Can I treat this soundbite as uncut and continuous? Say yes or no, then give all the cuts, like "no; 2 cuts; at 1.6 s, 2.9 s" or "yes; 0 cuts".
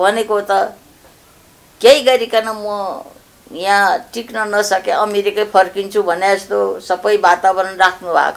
yes; 0 cuts